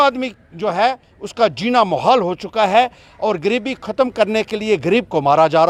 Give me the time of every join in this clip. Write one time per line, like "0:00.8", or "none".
none